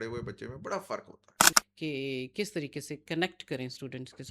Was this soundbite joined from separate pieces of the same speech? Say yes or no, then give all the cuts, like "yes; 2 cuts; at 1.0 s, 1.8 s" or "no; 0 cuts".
yes; 1 cut; at 1.4 s